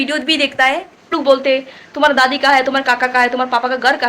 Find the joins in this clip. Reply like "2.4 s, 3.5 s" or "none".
1.1 s